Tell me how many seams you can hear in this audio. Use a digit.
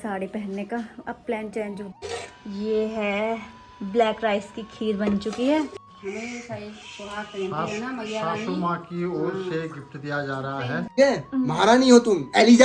3